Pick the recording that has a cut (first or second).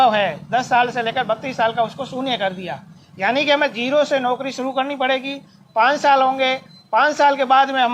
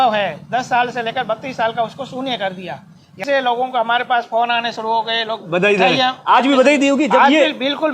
second